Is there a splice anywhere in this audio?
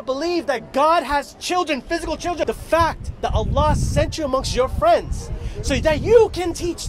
yes; 1 cut; at 2.4 s

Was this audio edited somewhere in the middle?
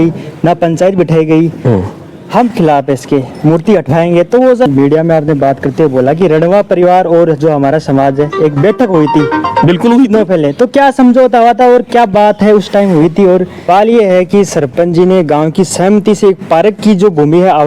yes; 2 cuts; at 4.7 s, 13.7 s

